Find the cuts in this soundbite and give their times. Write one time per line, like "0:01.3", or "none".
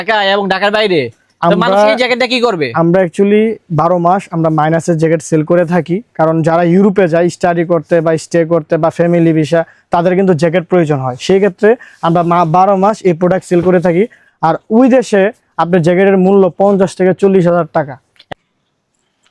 0:18.2